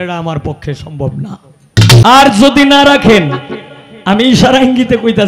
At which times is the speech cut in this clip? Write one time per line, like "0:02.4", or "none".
0:02.0